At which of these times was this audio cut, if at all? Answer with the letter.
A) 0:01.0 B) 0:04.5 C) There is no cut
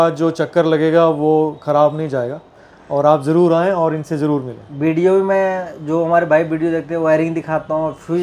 C